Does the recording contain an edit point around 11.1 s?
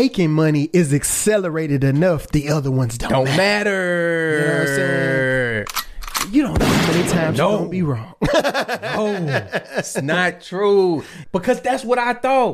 yes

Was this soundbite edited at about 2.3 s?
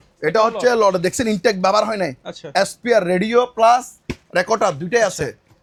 no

